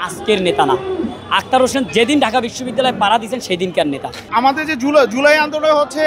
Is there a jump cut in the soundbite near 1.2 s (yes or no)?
no